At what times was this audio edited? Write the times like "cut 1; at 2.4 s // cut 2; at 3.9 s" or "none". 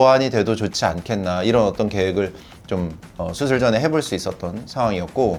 none

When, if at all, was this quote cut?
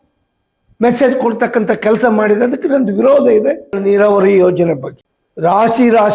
cut 1; at 3.7 s

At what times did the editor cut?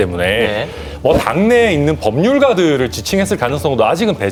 none

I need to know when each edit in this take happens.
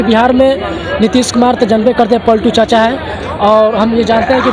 none

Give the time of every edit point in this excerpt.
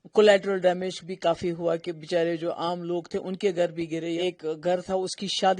cut 1; at 4.2 s

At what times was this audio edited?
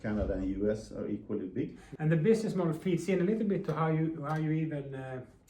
cut 1; at 1.8 s

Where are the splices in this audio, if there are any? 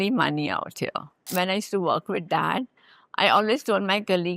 cut 1; at 1.3 s

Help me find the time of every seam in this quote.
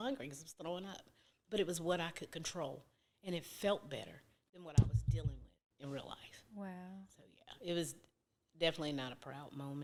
none

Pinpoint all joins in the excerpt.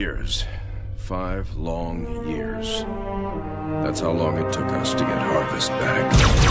none

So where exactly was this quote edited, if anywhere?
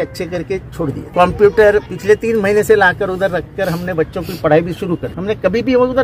cut 1; at 1.0 s // cut 2; at 1.9 s // cut 3; at 5.1 s

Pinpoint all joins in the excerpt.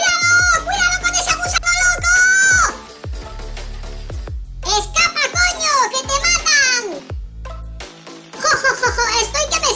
cut 1; at 2.7 s // cut 2; at 4.6 s // cut 3; at 7.0 s // cut 4; at 8.4 s

